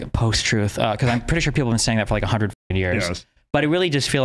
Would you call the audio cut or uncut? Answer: uncut